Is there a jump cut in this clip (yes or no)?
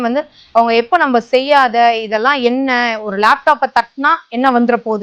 no